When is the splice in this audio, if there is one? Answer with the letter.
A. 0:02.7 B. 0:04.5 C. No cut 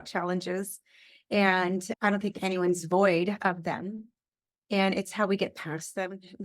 C